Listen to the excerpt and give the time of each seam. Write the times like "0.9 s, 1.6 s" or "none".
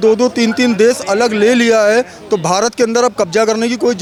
none